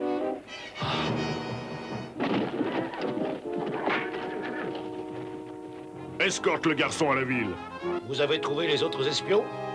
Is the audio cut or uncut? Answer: uncut